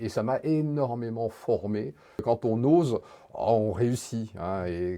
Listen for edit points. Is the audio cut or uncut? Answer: cut